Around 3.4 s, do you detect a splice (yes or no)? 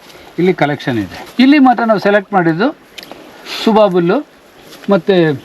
no